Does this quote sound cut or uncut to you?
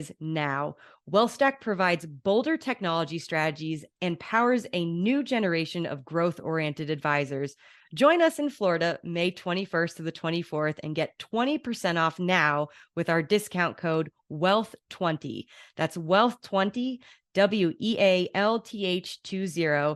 uncut